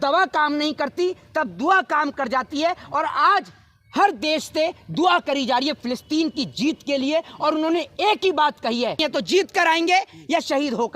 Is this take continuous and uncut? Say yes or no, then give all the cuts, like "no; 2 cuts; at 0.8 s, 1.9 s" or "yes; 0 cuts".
no; 1 cut; at 9.0 s